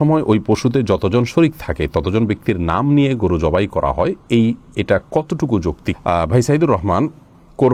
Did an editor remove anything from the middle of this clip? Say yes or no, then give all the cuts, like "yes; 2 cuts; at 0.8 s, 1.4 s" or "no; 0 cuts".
no; 0 cuts